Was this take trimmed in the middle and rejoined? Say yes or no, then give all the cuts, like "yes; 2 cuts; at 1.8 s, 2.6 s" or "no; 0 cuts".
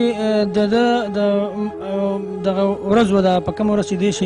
no; 0 cuts